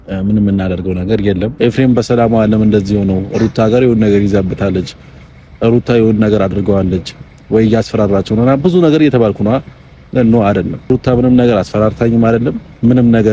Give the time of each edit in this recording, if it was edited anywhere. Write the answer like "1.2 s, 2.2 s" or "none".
1.5 s, 10.9 s